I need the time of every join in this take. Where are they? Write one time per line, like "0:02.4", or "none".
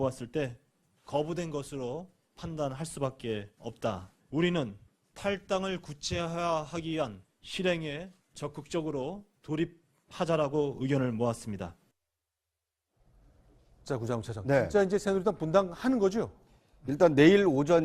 0:10.2